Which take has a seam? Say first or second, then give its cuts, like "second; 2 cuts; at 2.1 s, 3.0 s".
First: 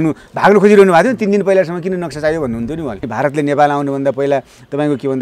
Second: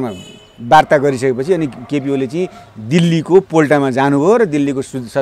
first; 1 cut; at 3.0 s